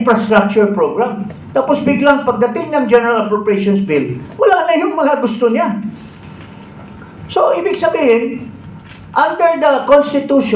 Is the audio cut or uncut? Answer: uncut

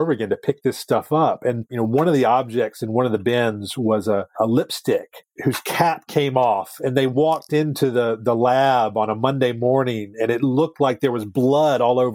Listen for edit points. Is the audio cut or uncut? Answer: cut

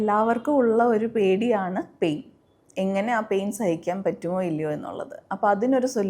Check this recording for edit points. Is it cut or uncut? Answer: uncut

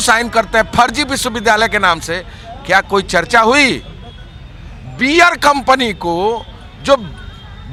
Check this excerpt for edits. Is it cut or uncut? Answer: uncut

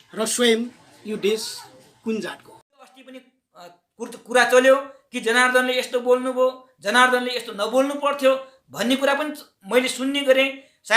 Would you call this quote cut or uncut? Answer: cut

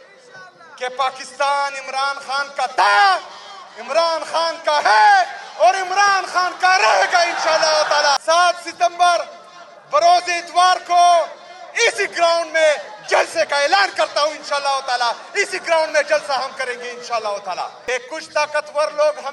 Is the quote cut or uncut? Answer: cut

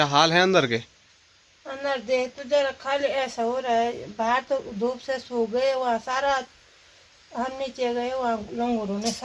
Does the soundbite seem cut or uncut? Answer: uncut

